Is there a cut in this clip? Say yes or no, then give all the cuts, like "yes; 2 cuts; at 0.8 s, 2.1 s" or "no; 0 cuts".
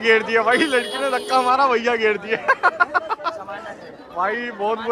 no; 0 cuts